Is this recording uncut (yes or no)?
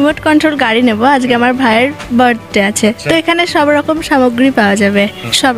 yes